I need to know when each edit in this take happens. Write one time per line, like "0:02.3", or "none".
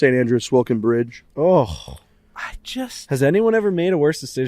0:01.2

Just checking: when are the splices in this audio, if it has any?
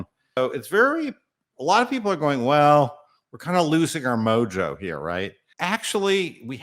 0:05.4

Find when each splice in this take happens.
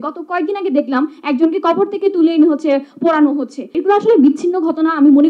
0:03.7

